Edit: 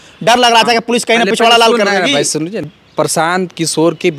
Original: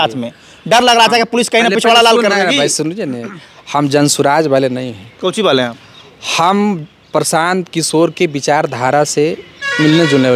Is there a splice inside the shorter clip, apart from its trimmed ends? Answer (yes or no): yes